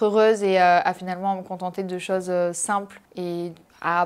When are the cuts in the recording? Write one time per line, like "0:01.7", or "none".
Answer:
none